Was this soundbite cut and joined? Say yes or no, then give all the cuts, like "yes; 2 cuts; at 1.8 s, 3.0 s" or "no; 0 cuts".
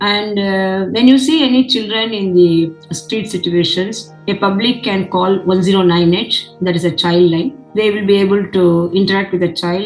yes; 1 cut; at 7.6 s